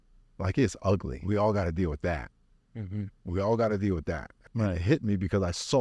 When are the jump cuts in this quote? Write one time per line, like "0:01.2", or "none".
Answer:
0:01.1
0:04.4